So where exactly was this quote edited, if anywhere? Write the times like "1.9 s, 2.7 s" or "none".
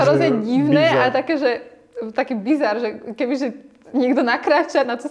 none